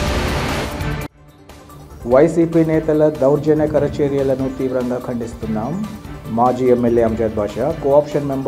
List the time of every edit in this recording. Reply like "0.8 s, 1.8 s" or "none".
0.9 s